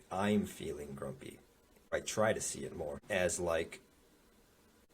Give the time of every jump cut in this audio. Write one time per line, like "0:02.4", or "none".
0:01.9
0:03.0